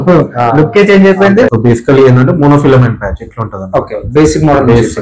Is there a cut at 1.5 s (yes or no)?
yes